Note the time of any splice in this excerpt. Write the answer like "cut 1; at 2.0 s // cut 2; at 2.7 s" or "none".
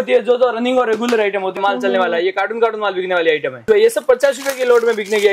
cut 1; at 1.6 s // cut 2; at 3.6 s